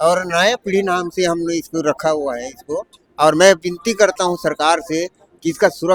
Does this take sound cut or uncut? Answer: uncut